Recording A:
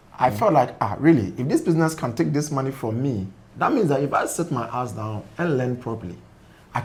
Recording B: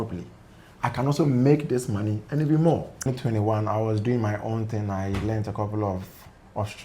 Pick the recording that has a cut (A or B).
B